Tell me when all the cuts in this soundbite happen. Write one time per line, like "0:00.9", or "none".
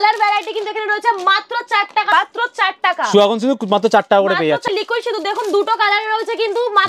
0:02.1
0:04.7

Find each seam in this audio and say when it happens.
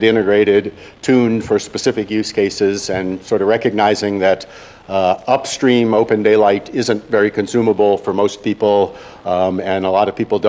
0:05.5

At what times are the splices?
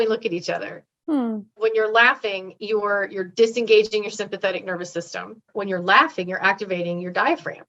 0:01.6
0:05.5

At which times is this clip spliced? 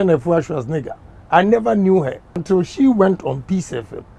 0:02.4

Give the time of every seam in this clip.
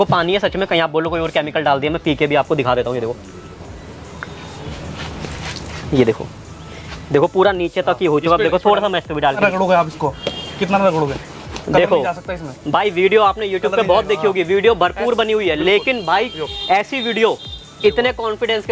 0:04.6
0:09.4

